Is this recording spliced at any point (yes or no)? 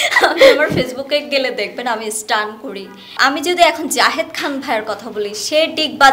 yes